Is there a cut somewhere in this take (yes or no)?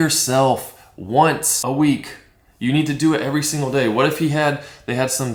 no